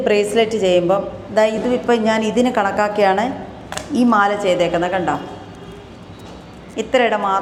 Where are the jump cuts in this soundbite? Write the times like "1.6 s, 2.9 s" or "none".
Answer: none